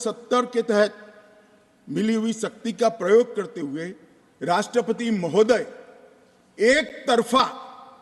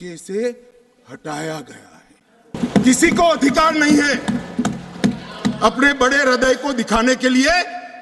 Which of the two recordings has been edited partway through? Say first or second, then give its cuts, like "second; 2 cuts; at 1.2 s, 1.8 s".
second; 1 cut; at 2.5 s